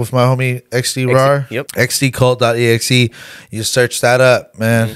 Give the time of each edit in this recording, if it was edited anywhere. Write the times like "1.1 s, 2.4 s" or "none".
1.6 s